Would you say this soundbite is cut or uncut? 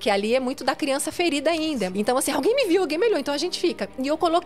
cut